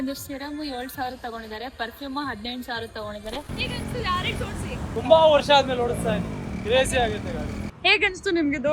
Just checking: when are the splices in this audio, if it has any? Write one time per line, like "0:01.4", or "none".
0:03.5
0:04.9
0:07.7